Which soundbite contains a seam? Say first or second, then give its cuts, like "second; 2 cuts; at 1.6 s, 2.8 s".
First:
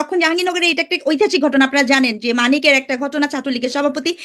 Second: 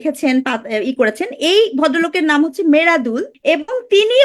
second; 1 cut; at 3.3 s